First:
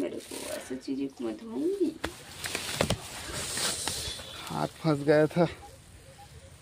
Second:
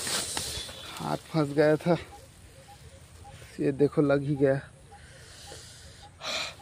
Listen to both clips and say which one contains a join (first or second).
first